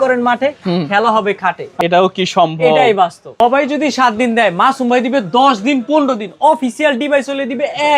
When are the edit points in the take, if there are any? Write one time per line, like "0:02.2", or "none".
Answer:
0:01.7
0:03.2